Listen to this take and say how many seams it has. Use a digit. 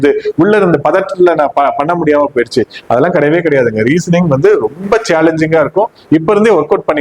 0